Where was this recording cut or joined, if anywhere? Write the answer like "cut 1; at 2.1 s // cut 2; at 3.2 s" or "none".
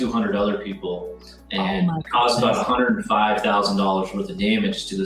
none

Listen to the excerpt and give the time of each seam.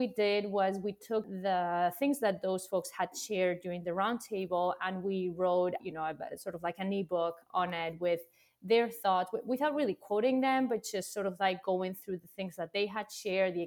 cut 1; at 1.3 s // cut 2; at 5.8 s

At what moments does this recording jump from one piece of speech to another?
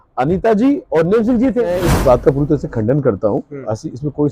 cut 1; at 1.9 s

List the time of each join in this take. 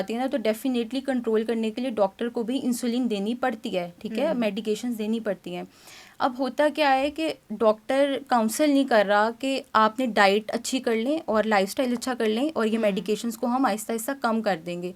none

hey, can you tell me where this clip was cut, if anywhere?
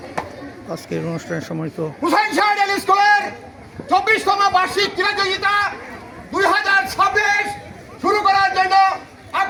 none

